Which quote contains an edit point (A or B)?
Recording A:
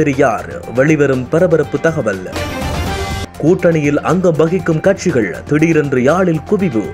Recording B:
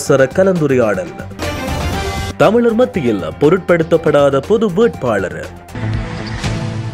B